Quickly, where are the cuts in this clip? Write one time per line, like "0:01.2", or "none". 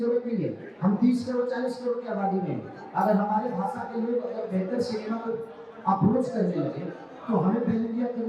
none